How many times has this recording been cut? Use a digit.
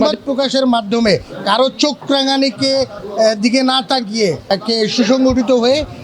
1